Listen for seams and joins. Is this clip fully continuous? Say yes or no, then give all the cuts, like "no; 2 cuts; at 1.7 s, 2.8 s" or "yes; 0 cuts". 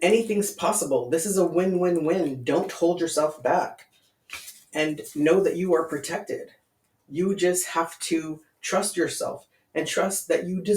yes; 0 cuts